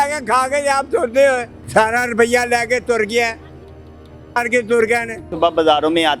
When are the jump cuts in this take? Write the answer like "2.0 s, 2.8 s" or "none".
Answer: 1.5 s, 5.3 s